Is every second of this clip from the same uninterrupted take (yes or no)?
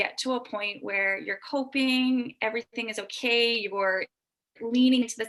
yes